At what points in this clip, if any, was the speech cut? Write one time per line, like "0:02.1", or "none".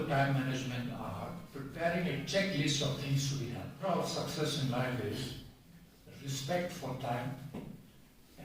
0:03.7